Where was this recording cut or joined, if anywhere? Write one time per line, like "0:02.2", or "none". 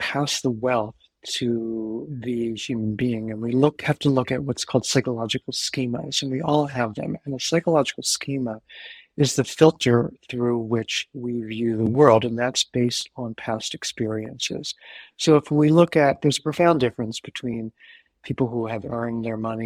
none